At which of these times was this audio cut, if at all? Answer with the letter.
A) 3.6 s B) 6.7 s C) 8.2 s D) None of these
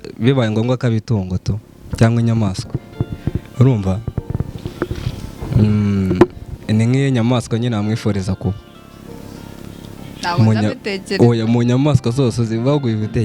D